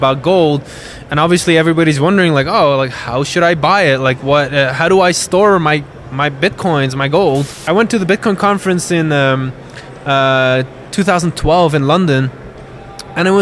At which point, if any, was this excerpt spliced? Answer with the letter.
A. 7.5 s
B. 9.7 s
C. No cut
A